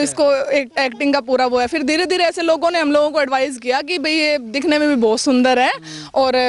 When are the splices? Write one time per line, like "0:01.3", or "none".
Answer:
none